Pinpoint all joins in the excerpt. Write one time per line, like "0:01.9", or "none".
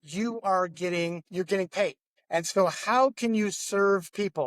0:02.1